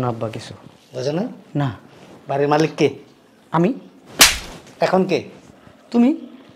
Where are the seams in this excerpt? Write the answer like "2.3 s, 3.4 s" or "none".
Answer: none